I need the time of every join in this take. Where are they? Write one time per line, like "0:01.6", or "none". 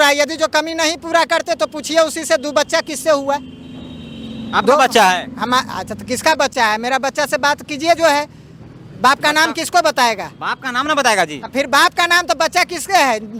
none